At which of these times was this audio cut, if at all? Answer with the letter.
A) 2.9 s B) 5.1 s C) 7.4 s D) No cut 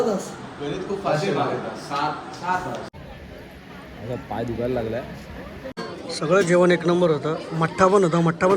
A